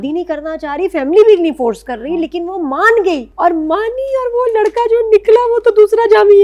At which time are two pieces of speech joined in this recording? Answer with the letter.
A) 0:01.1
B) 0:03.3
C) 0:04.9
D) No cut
B